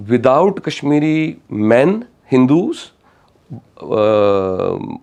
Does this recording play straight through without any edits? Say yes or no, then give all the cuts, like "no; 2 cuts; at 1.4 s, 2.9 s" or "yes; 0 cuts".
yes; 0 cuts